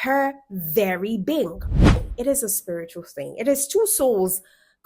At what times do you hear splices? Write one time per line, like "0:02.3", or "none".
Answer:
0:02.0